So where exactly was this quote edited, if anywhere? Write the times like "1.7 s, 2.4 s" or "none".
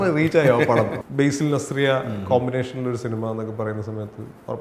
1.0 s